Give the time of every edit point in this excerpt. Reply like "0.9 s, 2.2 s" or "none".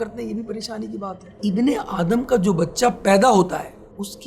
1.2 s